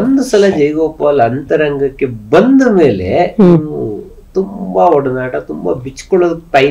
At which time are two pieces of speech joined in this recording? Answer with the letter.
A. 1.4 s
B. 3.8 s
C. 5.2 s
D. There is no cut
D